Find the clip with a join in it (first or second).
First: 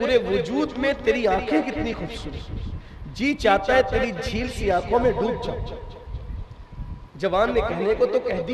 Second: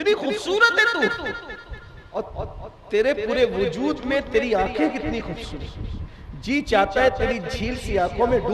second